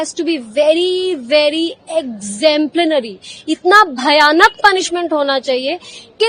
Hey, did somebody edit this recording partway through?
no; 0 cuts

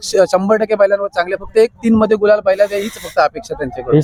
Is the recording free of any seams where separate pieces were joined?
yes; 0 cuts

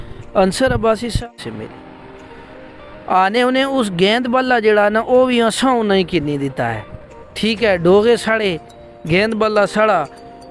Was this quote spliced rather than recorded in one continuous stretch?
yes; 1 cut; at 1.2 s

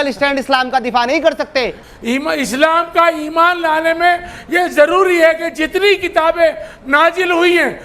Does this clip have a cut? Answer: yes; 1 cut; at 1.8 s

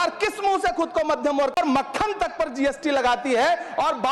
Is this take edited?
yes; 1 cut; at 1.5 s

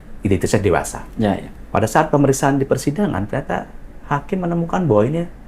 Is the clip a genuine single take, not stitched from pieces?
yes; 0 cuts

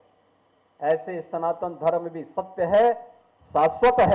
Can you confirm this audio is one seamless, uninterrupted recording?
yes; 0 cuts

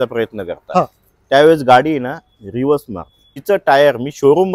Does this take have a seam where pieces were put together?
yes; 1 cut; at 3.3 s

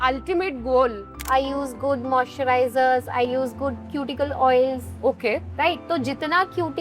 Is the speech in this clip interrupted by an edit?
yes; 2 cuts; at 1.2 s, 3.3 s

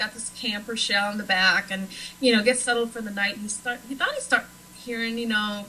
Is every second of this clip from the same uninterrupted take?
no; 1 cut; at 4.5 s

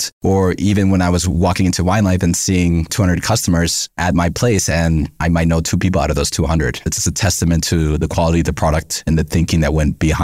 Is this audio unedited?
yes; 0 cuts

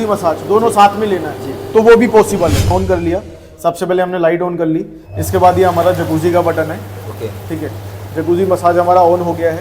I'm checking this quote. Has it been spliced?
yes; 1 cut; at 2.7 s

